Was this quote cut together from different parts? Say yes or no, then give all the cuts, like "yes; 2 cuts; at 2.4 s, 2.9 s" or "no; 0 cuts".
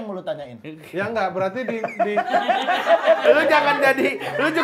no; 0 cuts